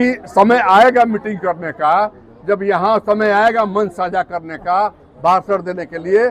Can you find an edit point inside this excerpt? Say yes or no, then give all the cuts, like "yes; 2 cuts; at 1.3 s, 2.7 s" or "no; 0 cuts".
no; 0 cuts